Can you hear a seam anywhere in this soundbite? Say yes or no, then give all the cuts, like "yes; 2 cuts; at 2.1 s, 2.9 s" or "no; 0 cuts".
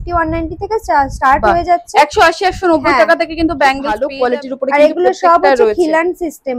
yes; 1 cut; at 4.1 s